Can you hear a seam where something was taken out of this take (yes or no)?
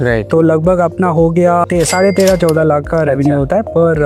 no